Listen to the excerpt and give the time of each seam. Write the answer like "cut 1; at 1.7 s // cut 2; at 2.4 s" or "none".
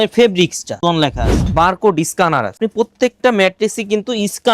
cut 1; at 1.0 s